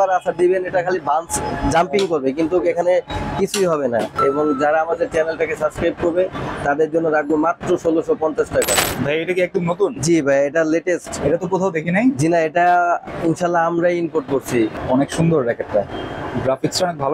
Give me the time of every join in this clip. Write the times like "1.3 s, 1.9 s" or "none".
4.1 s, 8.7 s, 14.8 s